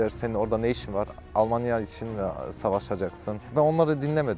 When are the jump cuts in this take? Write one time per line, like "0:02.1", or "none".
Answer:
0:03.4